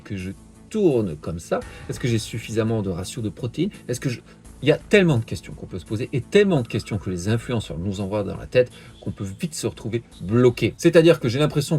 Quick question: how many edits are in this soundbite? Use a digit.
1